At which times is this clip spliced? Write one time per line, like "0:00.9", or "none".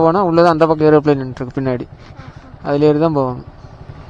none